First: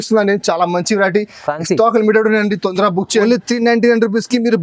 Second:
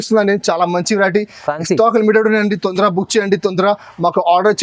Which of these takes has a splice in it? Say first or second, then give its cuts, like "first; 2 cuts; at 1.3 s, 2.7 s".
first; 1 cut; at 3.2 s